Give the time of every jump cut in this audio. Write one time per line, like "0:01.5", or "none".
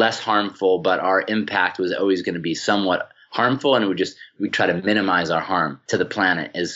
0:04.3
0:05.8